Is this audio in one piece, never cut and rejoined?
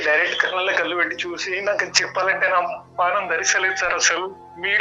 yes; 0 cuts

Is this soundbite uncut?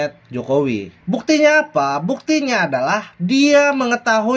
no; 1 cut; at 0.9 s

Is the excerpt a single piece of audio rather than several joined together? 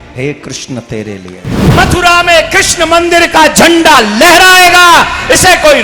no; 1 cut; at 1.6 s

